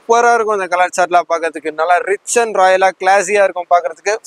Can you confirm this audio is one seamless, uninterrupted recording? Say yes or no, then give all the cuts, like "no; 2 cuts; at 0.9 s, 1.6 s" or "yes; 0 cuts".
yes; 0 cuts